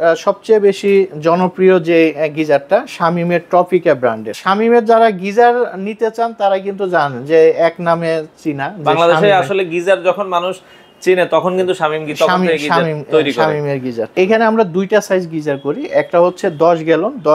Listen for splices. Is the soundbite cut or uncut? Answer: cut